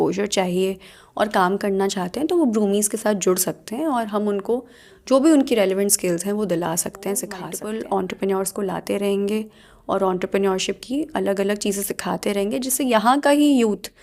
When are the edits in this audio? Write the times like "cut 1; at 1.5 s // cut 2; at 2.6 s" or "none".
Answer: none